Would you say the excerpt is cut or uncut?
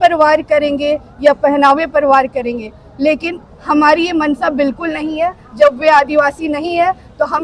uncut